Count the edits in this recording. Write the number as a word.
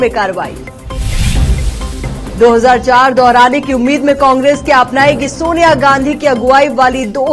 zero